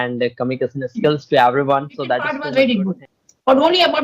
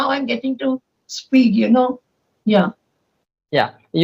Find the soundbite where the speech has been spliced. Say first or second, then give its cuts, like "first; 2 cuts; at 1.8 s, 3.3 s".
first; 1 cut; at 2.4 s